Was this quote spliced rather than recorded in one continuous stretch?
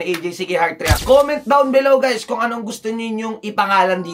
yes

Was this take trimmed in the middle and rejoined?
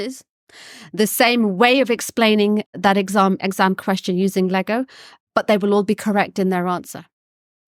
no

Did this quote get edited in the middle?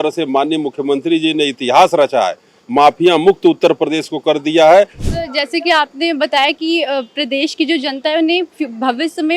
yes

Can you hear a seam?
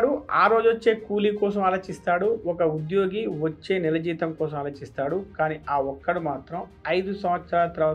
no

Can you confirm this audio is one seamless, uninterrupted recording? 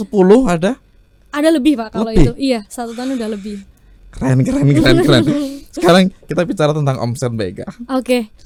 yes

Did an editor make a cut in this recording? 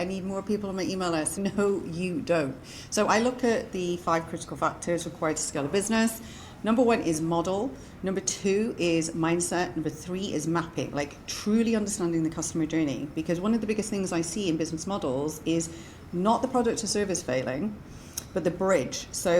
yes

